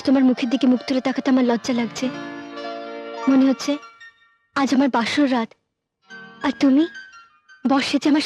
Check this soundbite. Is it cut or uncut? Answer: uncut